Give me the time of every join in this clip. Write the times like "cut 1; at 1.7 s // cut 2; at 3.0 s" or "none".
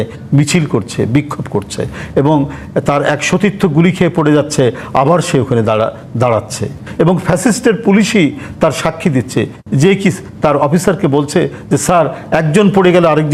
none